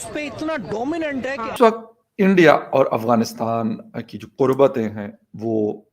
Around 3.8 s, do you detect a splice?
no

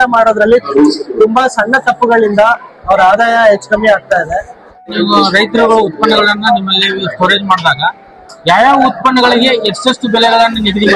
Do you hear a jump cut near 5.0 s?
yes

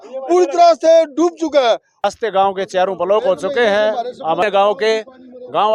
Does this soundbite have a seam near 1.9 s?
yes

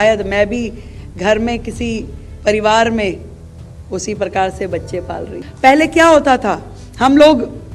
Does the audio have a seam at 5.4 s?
yes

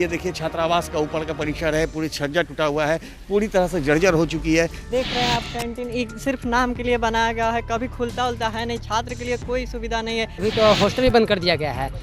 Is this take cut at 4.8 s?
yes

